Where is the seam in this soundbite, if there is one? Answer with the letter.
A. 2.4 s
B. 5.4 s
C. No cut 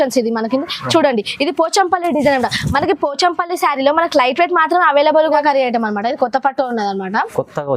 B